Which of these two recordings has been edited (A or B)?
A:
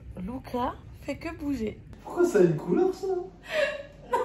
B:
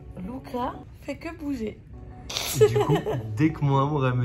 A